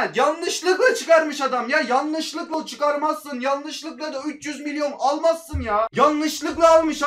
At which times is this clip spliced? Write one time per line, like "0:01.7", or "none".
0:02.5
0:05.9